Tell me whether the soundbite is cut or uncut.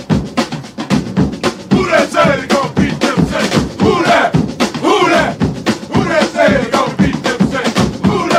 uncut